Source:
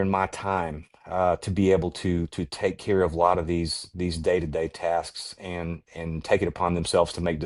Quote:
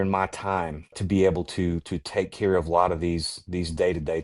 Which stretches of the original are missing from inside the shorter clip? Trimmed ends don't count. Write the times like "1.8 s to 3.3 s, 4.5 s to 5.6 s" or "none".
1.0 s to 1.5 s